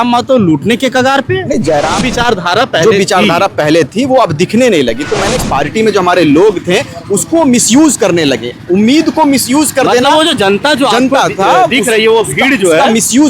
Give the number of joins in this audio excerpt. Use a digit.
2